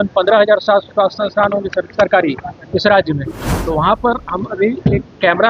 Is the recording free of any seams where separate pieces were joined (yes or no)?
yes